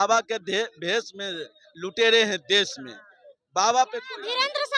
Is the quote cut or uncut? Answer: uncut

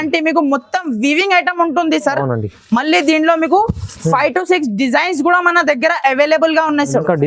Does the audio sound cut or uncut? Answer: uncut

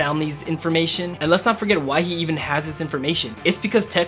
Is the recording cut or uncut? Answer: cut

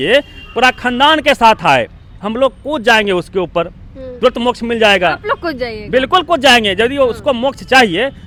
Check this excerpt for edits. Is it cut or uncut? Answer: uncut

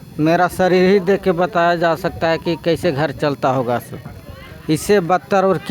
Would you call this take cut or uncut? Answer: uncut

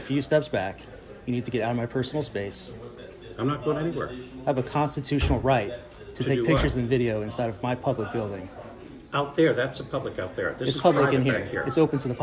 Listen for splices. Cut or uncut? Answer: uncut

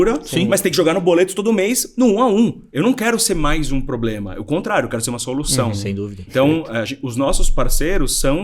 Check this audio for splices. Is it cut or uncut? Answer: cut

